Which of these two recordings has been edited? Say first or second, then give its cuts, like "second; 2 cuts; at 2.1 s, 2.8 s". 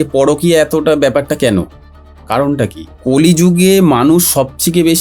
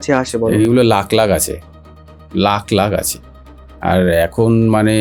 first; 1 cut; at 2.9 s